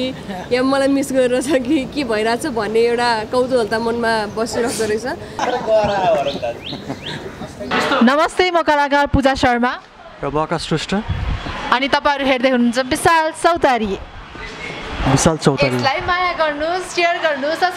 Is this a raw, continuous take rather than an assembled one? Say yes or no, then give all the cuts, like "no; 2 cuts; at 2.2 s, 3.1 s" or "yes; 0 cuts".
no; 2 cuts; at 5.4 s, 7.7 s